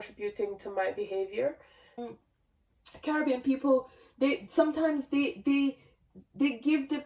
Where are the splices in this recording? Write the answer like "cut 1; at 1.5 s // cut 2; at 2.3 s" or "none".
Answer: cut 1; at 2.1 s